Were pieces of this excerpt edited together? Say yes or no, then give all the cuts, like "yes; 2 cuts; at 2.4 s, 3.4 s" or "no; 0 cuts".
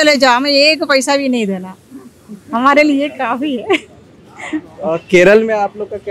no; 0 cuts